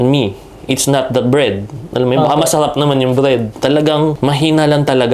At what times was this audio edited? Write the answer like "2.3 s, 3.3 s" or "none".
4.2 s